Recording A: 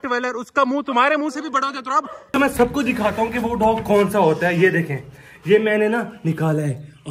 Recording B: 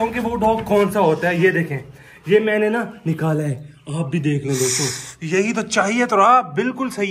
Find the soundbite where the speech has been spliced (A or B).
A